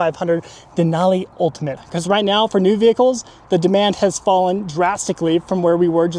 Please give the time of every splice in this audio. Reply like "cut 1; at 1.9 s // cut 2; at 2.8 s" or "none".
cut 1; at 1.8 s